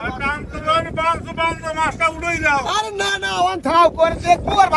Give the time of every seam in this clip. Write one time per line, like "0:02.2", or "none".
none